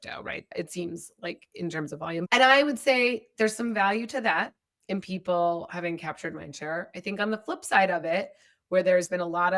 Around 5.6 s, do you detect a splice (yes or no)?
no